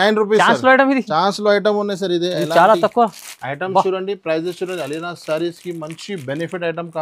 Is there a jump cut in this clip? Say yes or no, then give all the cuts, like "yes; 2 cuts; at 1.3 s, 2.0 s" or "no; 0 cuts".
no; 0 cuts